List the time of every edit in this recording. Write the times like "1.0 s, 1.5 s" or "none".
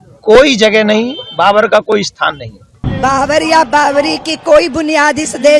2.8 s

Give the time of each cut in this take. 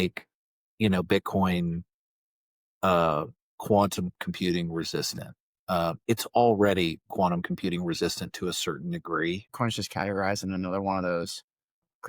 9.5 s

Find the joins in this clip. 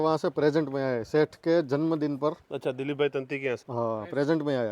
2.5 s, 3.7 s

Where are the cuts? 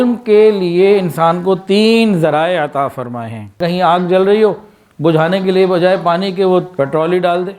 3.6 s, 6.7 s

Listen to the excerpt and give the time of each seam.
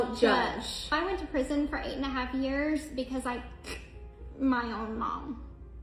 none

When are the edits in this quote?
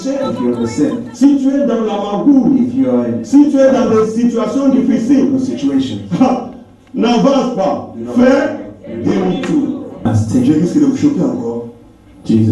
10.1 s

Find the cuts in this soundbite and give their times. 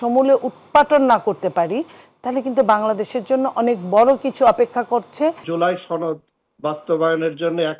5.4 s

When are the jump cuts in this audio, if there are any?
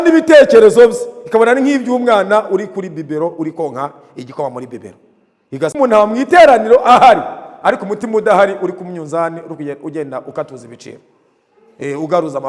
5.8 s

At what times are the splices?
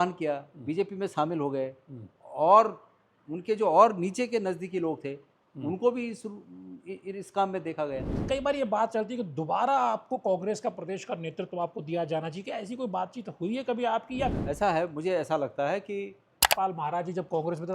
8.1 s, 14.4 s, 16.4 s

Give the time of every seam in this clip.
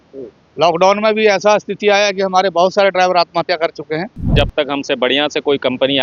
4.3 s

